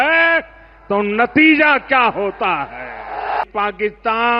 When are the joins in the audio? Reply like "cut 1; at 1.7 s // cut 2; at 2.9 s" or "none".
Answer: cut 1; at 3.4 s